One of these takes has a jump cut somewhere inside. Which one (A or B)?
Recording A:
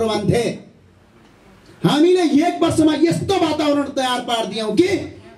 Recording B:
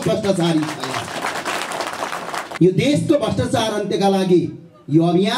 B